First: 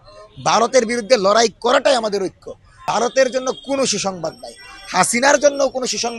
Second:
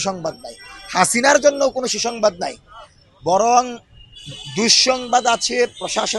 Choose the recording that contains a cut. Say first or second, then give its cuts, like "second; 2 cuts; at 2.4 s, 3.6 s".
first; 1 cut; at 2.8 s